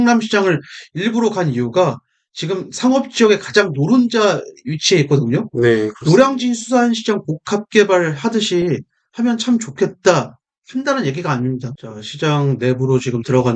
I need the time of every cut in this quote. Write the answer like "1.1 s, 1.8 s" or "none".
11.7 s